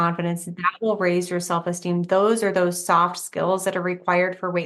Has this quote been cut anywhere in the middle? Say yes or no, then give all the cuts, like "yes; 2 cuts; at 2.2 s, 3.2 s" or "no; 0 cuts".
no; 0 cuts